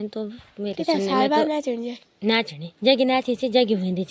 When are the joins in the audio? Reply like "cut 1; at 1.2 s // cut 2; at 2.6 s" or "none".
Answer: none